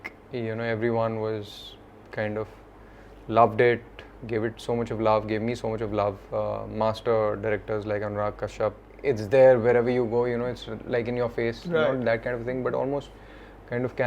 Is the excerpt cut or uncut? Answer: cut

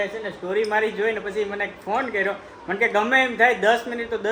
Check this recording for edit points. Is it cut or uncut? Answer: uncut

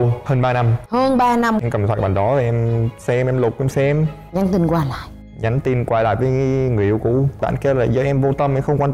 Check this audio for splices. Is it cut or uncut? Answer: cut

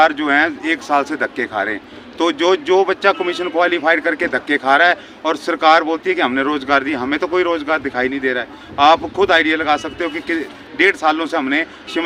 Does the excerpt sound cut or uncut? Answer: uncut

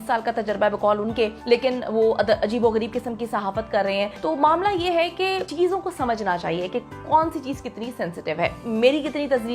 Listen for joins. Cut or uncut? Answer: cut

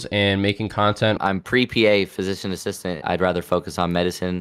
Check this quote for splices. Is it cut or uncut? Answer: cut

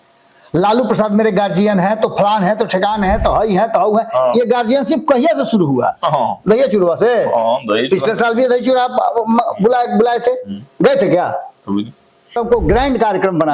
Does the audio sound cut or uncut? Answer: cut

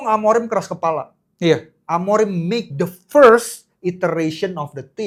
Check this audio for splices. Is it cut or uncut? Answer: uncut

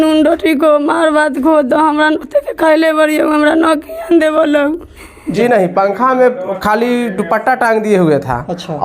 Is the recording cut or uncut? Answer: cut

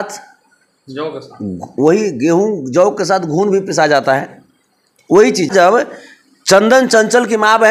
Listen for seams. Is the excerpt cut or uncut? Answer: cut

